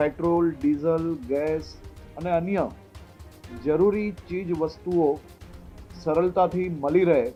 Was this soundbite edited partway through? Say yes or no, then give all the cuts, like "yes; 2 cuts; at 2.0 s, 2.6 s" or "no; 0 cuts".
no; 0 cuts